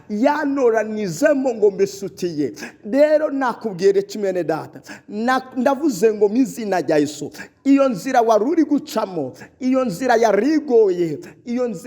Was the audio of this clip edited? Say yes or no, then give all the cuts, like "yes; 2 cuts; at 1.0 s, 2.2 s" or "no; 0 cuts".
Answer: no; 0 cuts